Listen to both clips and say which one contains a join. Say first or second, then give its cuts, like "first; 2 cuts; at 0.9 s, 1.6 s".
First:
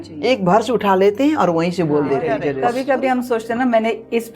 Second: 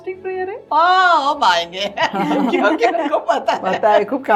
first; 1 cut; at 2.5 s